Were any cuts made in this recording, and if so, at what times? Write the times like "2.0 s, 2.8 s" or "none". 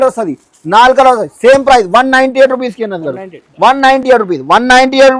none